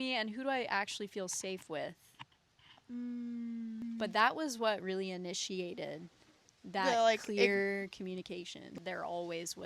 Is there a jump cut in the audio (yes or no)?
yes